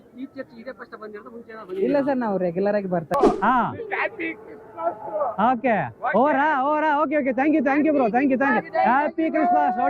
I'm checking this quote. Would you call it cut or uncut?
cut